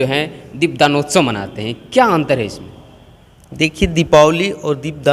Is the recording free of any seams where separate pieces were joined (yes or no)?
yes